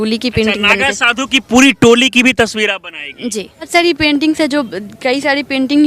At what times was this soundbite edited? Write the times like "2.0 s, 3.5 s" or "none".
3.7 s